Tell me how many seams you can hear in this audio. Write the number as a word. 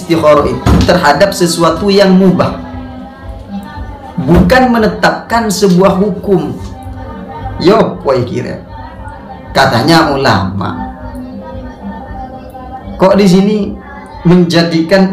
zero